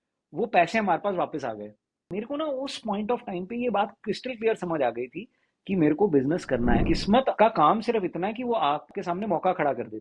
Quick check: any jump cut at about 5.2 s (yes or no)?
no